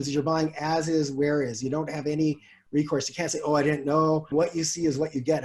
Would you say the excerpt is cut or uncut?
cut